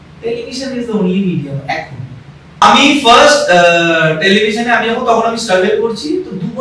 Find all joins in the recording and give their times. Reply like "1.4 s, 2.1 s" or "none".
2.6 s